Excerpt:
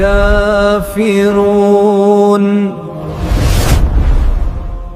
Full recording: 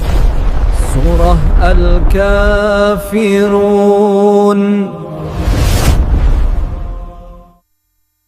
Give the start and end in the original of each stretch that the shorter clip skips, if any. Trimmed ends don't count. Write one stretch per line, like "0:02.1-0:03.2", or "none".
none